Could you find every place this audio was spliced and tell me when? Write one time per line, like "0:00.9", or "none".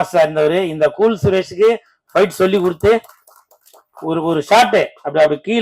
none

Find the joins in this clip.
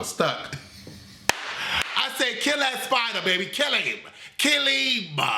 none

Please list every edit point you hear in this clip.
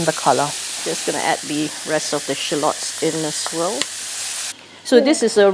0:04.3

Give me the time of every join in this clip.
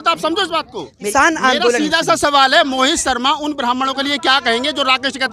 0:01.0

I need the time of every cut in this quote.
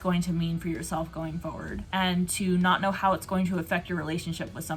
none

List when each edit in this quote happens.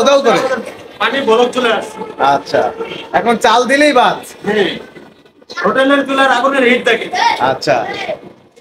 none

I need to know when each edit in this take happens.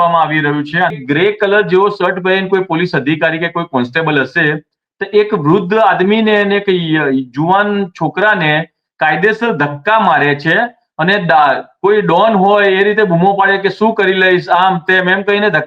0:01.0

